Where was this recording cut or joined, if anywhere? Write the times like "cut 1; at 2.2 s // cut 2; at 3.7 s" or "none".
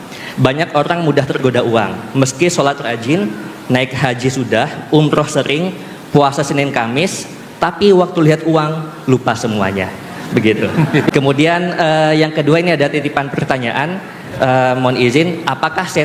cut 1; at 11.1 s